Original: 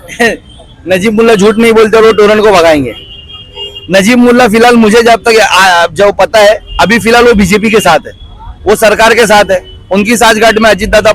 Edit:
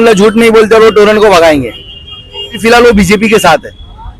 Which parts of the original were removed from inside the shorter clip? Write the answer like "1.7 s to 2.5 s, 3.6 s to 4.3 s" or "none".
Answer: 3.8 s to 7.0 s